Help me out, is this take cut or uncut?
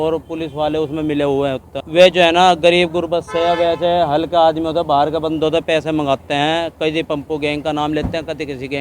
cut